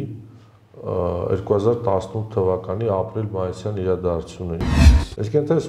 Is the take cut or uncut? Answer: cut